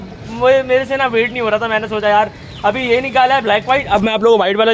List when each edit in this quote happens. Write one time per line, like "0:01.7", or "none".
none